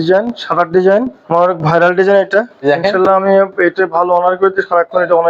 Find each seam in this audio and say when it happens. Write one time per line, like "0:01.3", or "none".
0:01.2
0:02.6